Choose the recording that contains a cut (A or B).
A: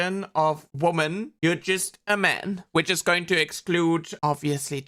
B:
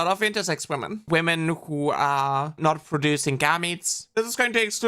B